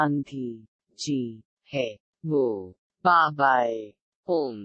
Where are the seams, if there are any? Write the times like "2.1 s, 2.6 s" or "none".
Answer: none